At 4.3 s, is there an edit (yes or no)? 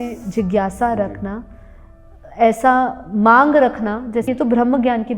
yes